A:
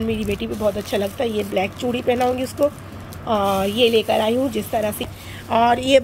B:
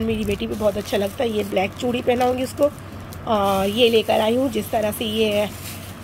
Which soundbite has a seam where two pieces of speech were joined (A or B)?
A